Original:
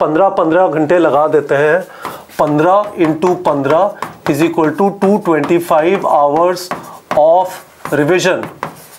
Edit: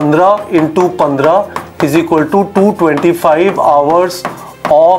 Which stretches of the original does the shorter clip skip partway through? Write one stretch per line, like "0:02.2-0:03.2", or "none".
none